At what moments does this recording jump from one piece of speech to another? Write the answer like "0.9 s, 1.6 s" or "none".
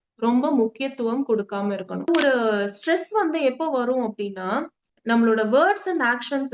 2.1 s